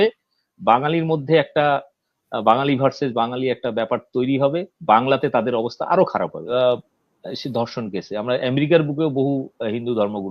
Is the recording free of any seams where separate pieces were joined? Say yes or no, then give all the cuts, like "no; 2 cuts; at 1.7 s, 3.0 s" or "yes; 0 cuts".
no; 1 cut; at 6.4 s